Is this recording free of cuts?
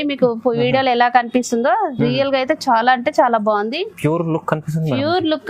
yes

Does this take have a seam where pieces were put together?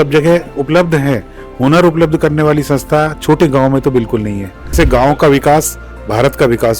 yes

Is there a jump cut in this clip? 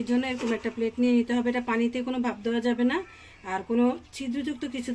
no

